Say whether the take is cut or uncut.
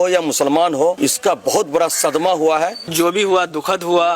cut